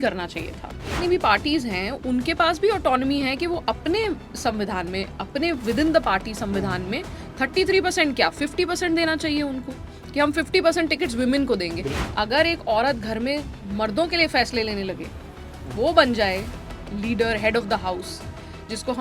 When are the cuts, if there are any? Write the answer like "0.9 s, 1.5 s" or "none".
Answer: 0.9 s, 12.0 s